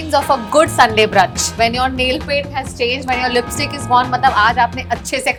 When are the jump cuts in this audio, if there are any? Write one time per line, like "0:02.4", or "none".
none

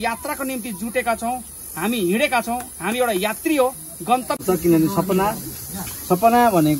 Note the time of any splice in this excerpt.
0:04.4

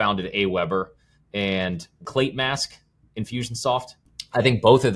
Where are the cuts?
0:02.0
0:04.0

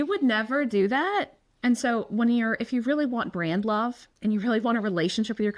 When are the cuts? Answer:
0:01.4
0:04.1

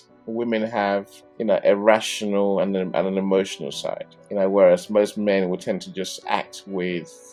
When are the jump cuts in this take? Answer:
none

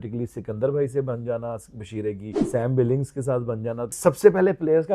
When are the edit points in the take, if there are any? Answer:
0:02.3
0:04.0

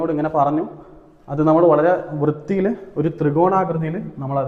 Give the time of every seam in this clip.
none

